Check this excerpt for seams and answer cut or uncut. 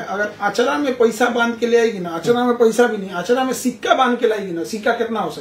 uncut